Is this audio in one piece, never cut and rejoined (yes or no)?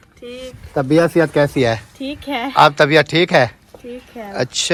yes